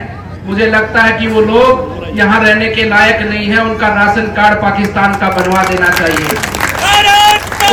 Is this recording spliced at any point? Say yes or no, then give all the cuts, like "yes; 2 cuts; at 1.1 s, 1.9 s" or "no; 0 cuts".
no; 0 cuts